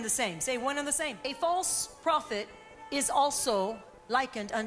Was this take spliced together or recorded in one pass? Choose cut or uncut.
cut